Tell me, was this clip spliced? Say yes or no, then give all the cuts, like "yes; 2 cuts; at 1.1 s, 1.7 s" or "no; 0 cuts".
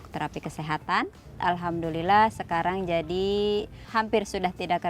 yes; 2 cuts; at 1.3 s, 3.8 s